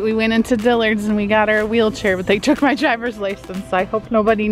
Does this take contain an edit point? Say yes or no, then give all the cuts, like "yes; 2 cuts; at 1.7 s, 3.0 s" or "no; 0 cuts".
no; 0 cuts